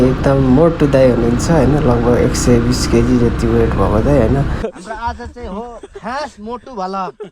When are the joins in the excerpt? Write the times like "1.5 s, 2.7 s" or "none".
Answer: 4.6 s